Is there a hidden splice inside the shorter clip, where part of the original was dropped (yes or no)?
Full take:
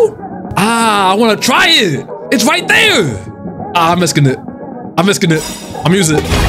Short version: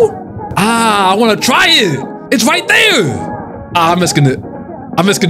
no